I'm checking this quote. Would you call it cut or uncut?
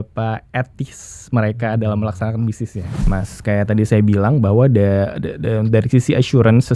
cut